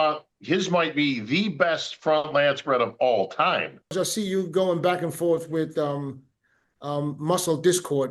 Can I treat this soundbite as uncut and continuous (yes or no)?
no